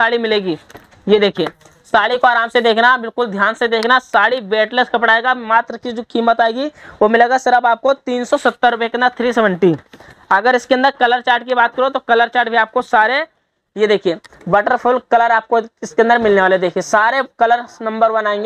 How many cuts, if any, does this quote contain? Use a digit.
0